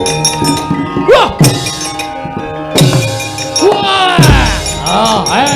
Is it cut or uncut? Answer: cut